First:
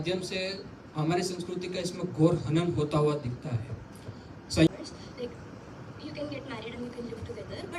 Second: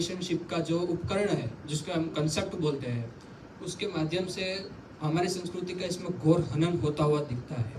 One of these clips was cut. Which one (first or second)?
first